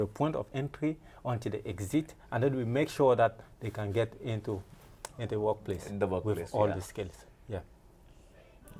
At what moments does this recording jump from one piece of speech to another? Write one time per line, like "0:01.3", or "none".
none